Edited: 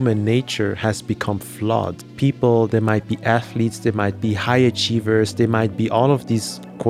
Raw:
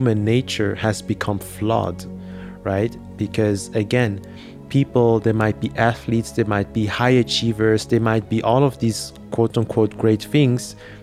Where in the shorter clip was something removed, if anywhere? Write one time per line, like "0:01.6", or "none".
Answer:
0:02.0